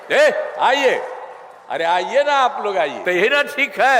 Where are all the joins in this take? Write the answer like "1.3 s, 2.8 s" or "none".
3.0 s